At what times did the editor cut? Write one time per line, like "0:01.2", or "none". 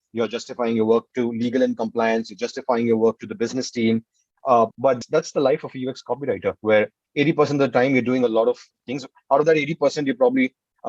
0:04.7